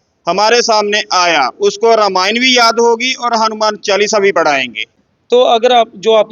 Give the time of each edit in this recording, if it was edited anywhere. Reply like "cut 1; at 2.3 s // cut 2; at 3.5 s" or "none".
cut 1; at 5.0 s